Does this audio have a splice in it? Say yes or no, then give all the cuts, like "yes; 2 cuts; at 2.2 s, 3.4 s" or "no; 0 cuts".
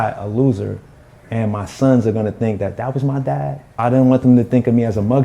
yes; 1 cut; at 3.8 s